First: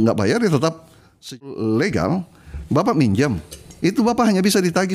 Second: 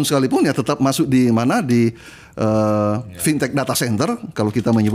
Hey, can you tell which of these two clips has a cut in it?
first; 1 cut; at 1.4 s

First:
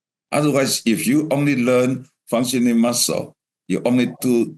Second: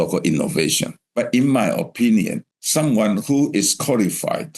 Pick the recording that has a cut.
second; 2 cuts; at 1.0 s, 2.4 s

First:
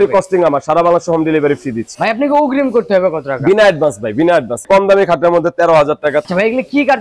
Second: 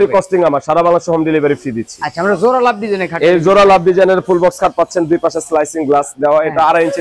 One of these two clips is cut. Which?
first; 3 cuts; at 1.9 s, 4.6 s, 6.3 s

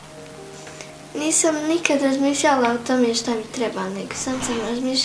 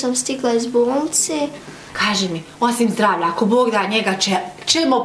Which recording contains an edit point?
second; 1 cut; at 1.9 s

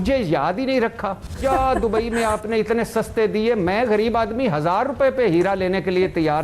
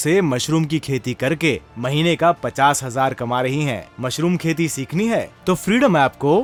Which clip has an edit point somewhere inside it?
first; 1 cut; at 1.4 s

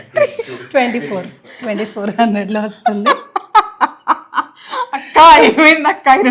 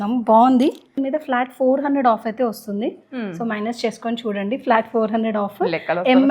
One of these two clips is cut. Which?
second; 1 cut; at 1.0 s

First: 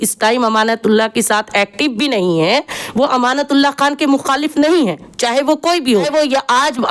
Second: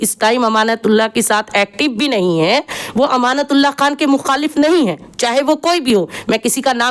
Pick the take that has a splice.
first; 1 cut; at 5.9 s

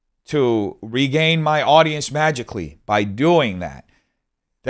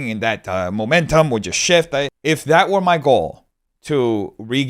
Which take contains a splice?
second; 1 cut; at 2.1 s

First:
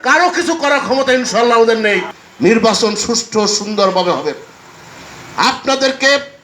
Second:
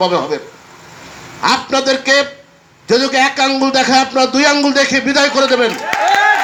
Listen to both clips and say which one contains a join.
first; 1 cut; at 2.1 s

